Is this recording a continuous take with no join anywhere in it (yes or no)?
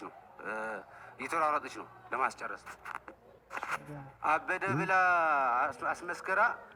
yes